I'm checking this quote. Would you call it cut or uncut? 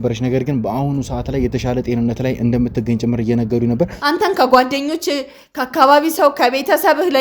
cut